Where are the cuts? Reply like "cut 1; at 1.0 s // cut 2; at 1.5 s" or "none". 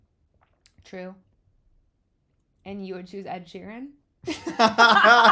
none